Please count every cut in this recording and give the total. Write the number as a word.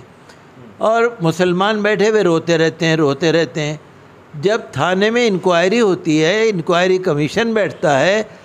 zero